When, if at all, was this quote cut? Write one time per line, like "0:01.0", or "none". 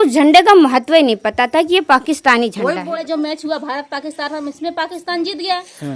0:02.9